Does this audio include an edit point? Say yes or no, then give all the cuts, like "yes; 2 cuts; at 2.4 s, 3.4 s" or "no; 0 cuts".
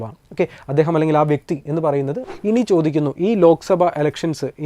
yes; 1 cut; at 2.3 s